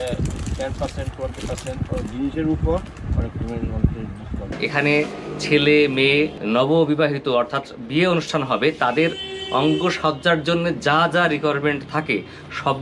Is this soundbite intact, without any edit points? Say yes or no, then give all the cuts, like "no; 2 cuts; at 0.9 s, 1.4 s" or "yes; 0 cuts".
no; 2 cuts; at 4.5 s, 6.4 s